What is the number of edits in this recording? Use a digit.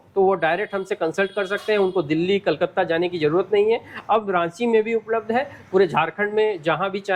0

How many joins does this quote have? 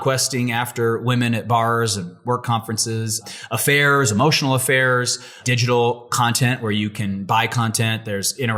2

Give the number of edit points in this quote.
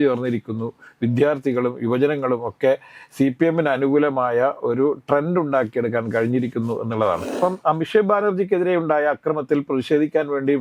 1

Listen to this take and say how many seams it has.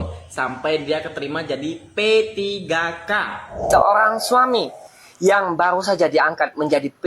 1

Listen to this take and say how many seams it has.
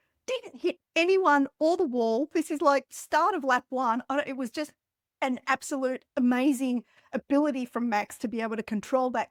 0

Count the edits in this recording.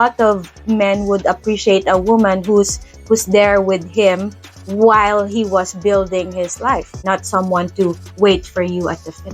1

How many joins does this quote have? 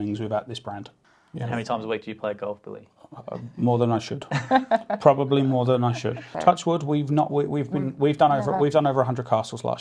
2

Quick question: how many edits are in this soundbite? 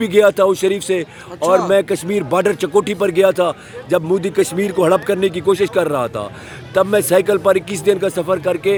0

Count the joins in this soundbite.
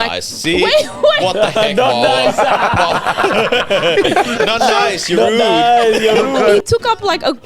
1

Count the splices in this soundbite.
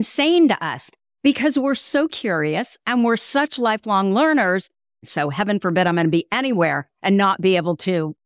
1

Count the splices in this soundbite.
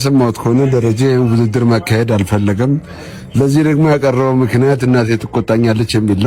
0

